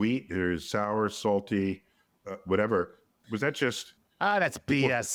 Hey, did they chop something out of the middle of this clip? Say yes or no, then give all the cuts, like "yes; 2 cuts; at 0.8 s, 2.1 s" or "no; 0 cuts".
no; 0 cuts